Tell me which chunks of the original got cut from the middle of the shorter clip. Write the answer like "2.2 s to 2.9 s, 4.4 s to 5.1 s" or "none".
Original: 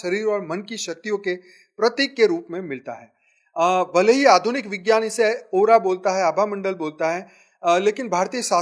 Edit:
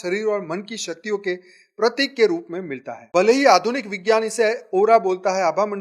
3.1 s to 3.9 s